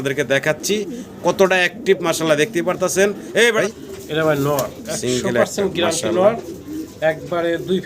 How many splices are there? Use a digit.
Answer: 1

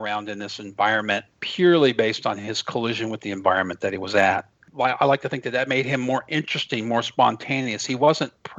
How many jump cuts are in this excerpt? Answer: 2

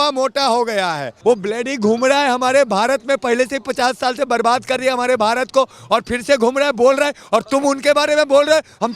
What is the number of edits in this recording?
1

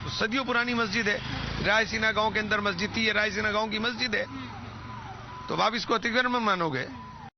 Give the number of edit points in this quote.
1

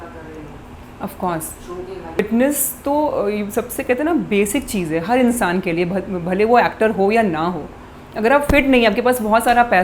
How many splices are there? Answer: 1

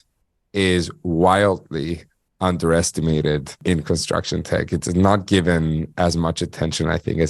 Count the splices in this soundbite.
1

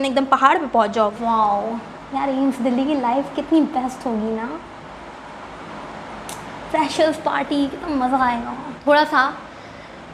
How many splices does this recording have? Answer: 2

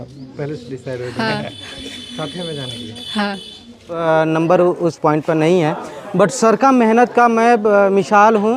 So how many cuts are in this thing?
1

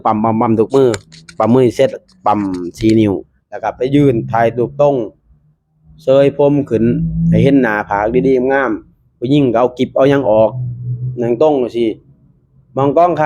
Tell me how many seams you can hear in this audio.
0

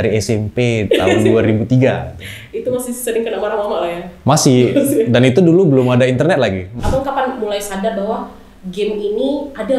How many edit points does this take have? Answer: 1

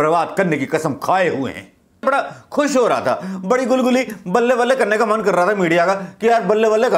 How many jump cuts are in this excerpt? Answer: 1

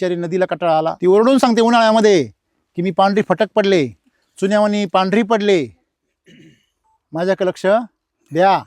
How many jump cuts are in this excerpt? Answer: 1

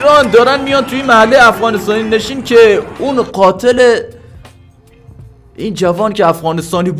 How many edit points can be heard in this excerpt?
0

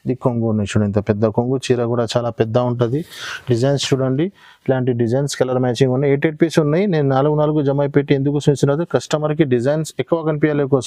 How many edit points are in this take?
0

